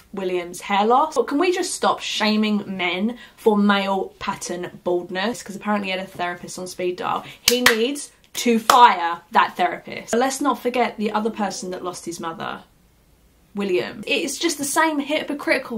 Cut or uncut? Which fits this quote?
cut